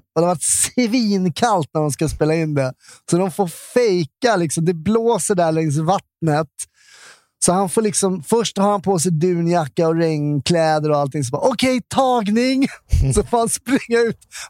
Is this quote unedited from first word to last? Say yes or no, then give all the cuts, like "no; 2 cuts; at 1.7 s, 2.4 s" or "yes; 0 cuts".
yes; 0 cuts